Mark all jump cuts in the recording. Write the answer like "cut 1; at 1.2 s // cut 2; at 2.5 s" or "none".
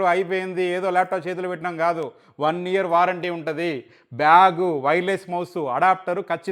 none